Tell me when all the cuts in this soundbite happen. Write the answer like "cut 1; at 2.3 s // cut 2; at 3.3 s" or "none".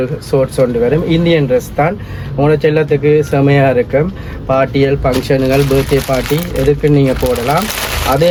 none